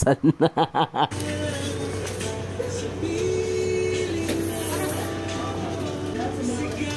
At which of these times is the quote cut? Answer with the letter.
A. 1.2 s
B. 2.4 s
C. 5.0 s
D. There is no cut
D